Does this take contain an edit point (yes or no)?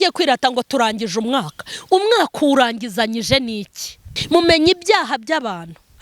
yes